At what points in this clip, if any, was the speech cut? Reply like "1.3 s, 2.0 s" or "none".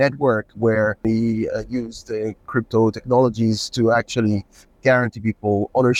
1.0 s